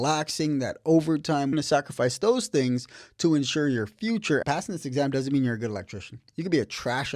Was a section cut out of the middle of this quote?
yes; 2 cuts; at 1.5 s, 4.4 s

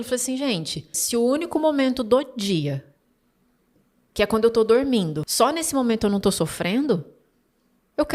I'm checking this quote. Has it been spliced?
yes; 2 cuts; at 1.0 s, 5.2 s

